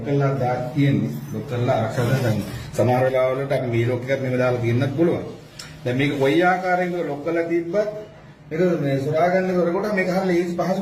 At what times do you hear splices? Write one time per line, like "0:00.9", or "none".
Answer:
none